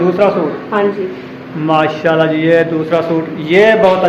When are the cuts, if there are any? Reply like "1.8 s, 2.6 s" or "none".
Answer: none